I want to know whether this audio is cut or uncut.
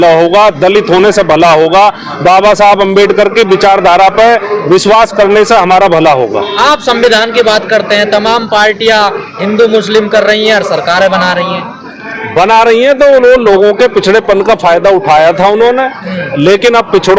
uncut